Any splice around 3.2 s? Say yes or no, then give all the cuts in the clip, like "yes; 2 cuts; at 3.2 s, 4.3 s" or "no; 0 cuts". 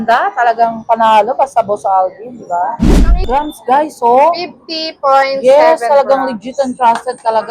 yes; 1 cut; at 3.2 s